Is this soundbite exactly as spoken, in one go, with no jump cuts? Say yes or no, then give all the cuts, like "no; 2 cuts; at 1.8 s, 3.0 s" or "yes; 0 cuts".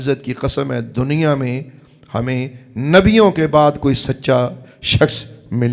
yes; 0 cuts